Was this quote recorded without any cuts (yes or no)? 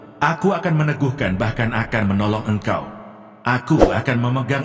yes